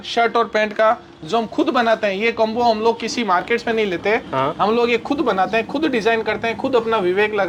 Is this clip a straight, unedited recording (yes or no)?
yes